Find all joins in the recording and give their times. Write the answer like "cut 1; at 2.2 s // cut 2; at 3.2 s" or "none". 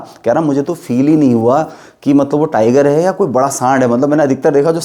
none